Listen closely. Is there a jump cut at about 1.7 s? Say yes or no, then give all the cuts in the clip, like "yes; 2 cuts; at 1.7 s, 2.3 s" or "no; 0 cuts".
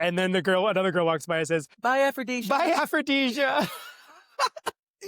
yes; 1 cut; at 1.7 s